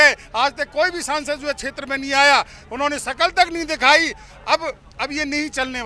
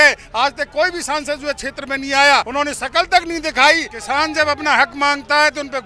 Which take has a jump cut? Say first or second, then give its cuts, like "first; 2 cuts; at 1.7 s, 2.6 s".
second; 2 cuts; at 2.5 s, 3.9 s